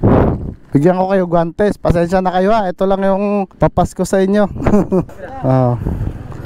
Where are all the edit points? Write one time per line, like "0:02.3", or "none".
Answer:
none